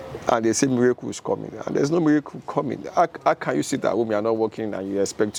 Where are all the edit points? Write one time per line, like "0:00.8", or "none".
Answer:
none

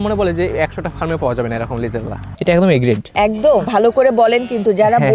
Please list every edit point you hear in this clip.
0:02.4
0:03.6

